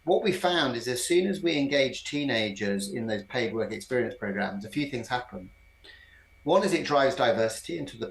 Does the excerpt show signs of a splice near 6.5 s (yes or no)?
no